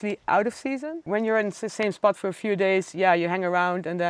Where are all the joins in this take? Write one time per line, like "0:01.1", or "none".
0:01.0